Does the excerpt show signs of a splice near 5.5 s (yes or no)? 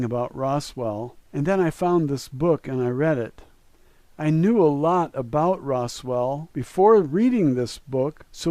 yes